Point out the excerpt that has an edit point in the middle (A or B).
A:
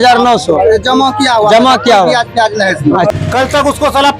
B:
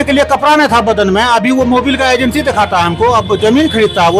A